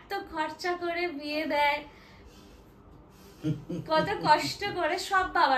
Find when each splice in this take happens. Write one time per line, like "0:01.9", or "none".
none